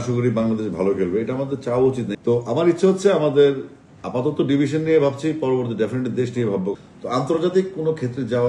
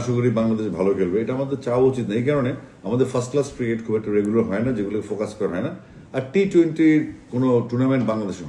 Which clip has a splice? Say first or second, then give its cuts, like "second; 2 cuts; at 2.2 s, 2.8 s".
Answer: first; 2 cuts; at 2.1 s, 6.8 s